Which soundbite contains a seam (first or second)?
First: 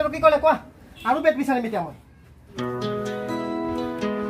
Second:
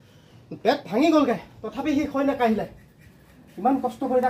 first